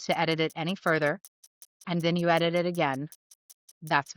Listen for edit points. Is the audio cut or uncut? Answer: uncut